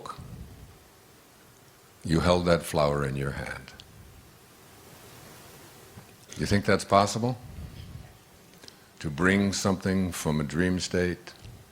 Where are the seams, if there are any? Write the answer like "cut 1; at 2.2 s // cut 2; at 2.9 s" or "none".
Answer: cut 1; at 6.2 s